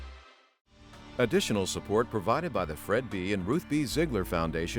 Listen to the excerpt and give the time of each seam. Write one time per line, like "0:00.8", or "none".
0:01.1